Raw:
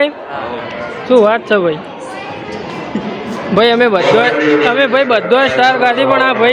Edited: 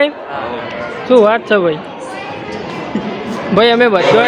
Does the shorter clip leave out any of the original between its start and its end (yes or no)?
no